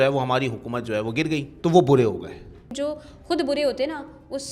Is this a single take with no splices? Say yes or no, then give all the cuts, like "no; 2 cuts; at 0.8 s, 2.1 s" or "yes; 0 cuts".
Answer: no; 2 cuts; at 1.5 s, 2.7 s